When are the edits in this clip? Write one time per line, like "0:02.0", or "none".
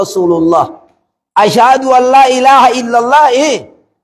none